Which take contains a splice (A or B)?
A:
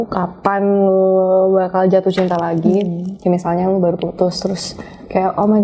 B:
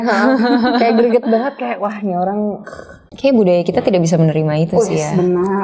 B